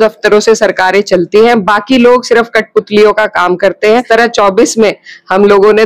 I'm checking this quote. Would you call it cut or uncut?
cut